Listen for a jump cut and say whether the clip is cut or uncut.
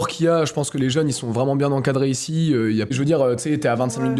cut